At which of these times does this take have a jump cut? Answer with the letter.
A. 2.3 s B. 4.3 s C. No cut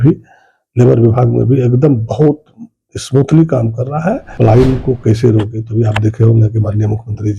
B